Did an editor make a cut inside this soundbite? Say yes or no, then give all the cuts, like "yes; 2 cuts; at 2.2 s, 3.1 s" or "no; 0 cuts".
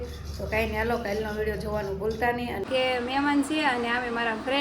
yes; 1 cut; at 2.6 s